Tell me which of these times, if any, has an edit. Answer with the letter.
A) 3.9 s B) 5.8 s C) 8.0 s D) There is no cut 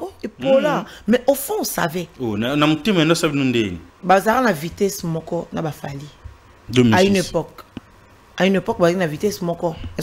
A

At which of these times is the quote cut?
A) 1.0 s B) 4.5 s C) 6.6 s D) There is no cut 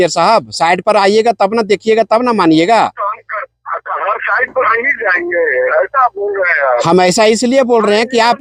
D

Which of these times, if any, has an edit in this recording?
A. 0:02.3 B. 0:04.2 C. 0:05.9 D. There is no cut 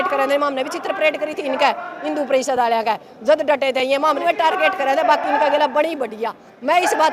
B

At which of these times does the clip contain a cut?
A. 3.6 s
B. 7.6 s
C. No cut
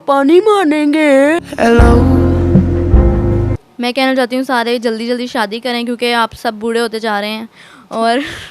A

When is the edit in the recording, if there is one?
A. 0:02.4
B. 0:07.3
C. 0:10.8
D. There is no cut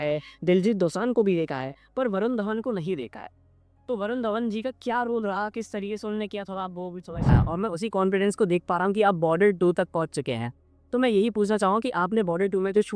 B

